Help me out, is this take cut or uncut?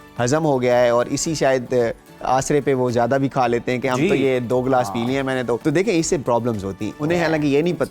cut